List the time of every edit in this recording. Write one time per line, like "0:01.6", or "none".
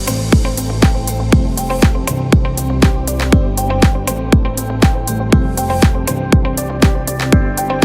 none